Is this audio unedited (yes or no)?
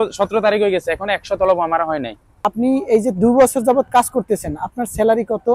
no